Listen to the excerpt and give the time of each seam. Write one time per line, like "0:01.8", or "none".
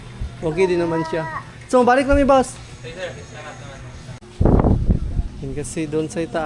0:04.2